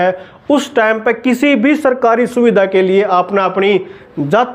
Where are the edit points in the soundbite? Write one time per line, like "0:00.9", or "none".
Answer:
none